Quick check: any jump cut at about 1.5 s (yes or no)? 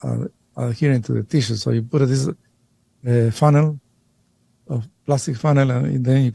no